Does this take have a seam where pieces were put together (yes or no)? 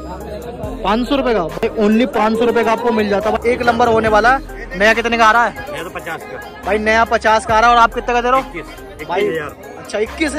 yes